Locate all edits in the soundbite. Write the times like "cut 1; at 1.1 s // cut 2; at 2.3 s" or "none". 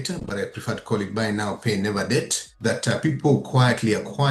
cut 1; at 2.4 s